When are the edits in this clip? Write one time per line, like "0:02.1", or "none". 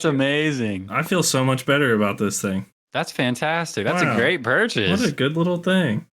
0:02.8